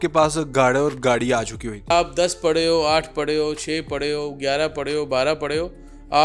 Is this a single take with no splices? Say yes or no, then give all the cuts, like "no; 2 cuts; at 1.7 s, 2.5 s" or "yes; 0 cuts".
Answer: no; 1 cut; at 1.9 s